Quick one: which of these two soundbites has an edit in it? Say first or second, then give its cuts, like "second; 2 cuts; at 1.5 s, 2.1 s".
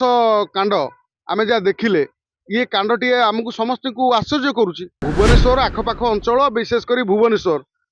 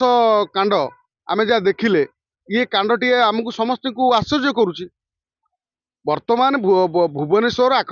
first; 1 cut; at 5.0 s